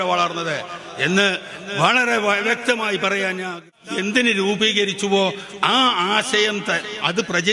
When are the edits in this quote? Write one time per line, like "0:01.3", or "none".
0:03.6